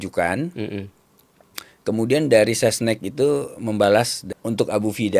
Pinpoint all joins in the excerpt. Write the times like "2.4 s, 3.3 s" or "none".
4.2 s